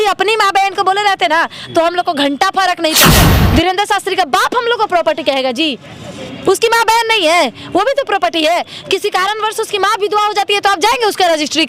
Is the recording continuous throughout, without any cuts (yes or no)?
no